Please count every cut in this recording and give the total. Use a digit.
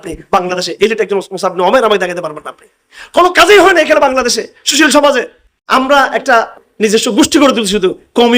2